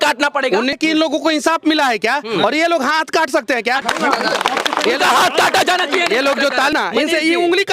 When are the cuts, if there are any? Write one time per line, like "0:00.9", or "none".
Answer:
0:00.8
0:03.8
0:06.7

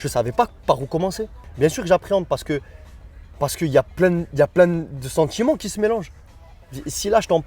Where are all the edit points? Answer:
0:01.4

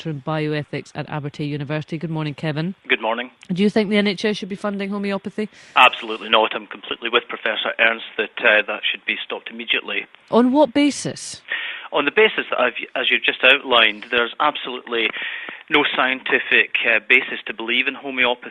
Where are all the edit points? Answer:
0:15.6

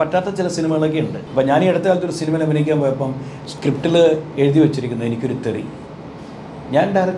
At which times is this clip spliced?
0:01.2

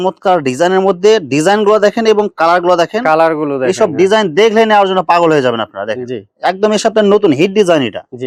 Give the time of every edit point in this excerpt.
none

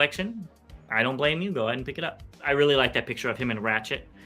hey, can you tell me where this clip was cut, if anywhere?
0:02.4

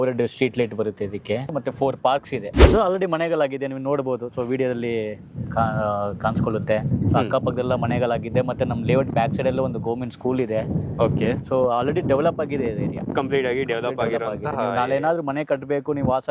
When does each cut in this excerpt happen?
0:01.6
0:02.6

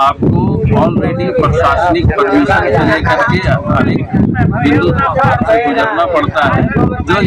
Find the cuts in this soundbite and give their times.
none

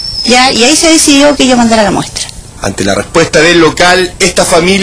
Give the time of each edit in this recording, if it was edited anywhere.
0:03.8

